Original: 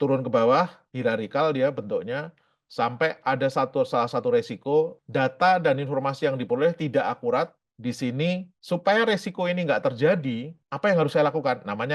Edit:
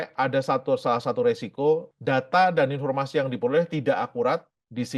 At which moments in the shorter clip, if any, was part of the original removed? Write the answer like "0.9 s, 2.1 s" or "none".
none

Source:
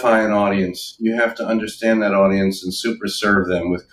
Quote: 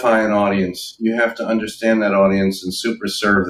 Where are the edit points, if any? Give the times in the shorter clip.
none

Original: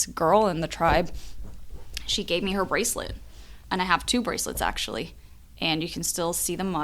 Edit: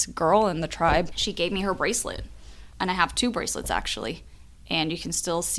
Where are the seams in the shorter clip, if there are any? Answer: 1.2 s

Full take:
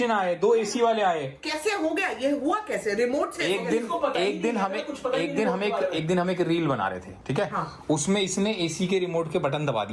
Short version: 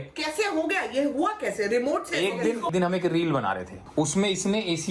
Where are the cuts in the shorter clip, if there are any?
2.7 s, 3.8 s

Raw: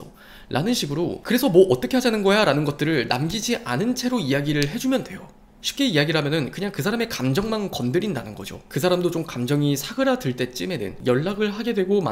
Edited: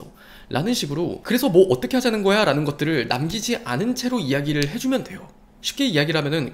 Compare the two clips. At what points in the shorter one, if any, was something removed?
none

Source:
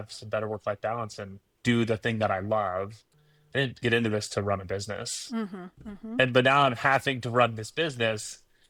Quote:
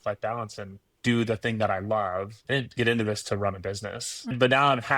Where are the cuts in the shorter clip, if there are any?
2.3 s, 4.3 s

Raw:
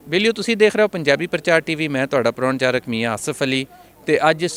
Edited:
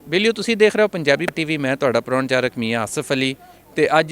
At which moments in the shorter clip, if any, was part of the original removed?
1.3 s

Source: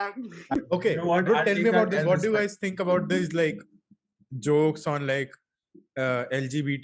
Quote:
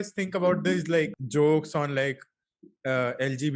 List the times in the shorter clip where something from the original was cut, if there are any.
1.2 s

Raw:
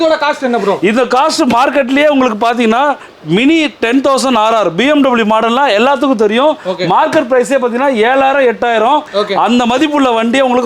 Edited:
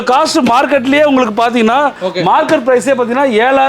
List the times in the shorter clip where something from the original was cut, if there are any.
2.0 s

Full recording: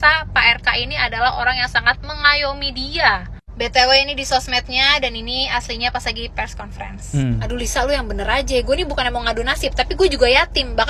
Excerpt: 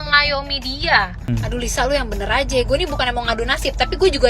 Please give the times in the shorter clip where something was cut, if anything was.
1.3 s

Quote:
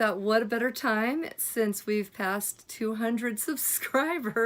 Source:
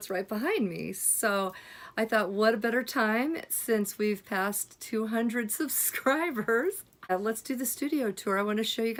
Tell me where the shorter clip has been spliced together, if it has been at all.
none

